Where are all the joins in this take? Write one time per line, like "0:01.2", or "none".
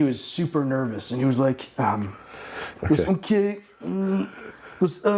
0:02.6